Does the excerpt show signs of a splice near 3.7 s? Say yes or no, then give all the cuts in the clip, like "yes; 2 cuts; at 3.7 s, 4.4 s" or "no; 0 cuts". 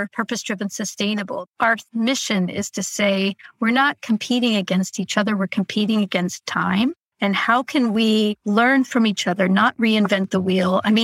no; 2 cuts; at 1.4 s, 7.1 s